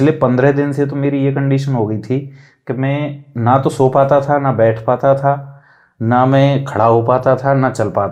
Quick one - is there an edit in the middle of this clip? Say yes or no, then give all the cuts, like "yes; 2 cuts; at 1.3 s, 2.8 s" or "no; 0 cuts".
no; 0 cuts